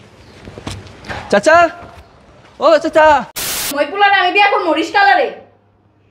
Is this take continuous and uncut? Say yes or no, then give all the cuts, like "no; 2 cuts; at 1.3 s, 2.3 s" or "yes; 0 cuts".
no; 1 cut; at 3.7 s